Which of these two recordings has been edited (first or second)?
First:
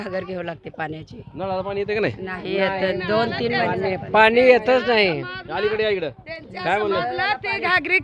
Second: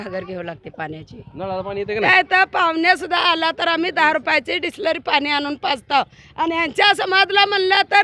second